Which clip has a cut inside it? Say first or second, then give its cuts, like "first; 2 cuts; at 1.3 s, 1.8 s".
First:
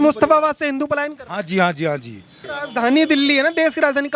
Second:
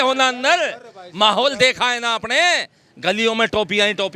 first; 1 cut; at 2.4 s